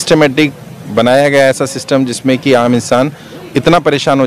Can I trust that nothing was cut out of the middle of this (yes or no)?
yes